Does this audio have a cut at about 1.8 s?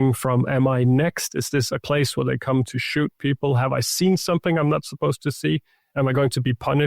yes; 1 cut; at 1.8 s

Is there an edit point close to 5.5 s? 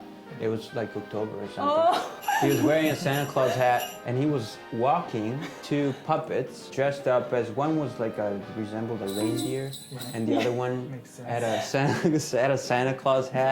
yes; 3 cuts; at 2.1 s, 5.5 s, 6.7 s

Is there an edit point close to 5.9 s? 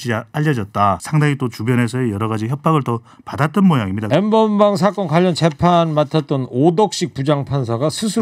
no; 2 cuts; at 1.0 s, 4.0 s

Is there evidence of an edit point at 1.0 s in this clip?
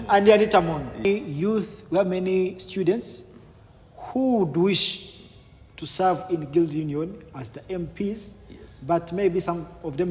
yes; 1 cut; at 1.0 s

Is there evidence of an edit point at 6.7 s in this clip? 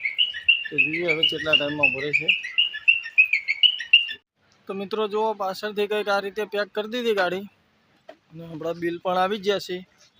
no; 1 cut; at 4.3 s

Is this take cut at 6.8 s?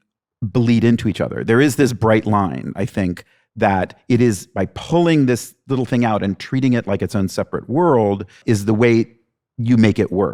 no; 1 cut; at 8.3 s

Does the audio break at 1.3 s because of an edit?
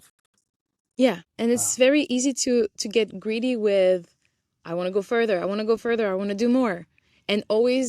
yes; 1 cut; at 1.3 s

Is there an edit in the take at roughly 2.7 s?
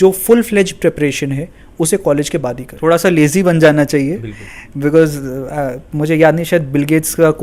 yes; 1 cut; at 2.7 s

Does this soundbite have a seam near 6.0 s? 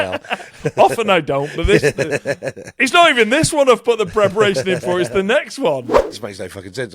yes; 1 cut; at 6.0 s

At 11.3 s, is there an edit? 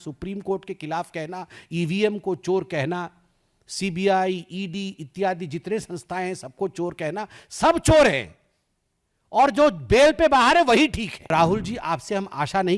yes; 1 cut; at 11.3 s

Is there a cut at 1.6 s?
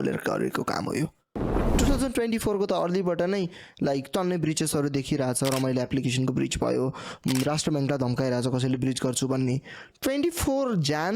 yes; 1 cut; at 1.6 s

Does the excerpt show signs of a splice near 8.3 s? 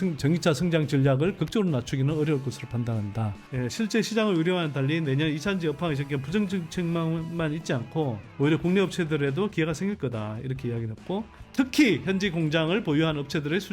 no; 2 cuts; at 3.4 s, 11.4 s

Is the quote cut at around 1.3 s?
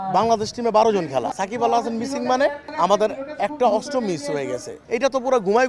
yes; 2 cuts; at 1.3 s, 4.7 s

